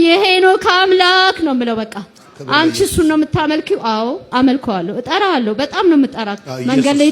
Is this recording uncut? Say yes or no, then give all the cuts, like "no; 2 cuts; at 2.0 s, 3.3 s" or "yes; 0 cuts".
no; 1 cut; at 4.3 s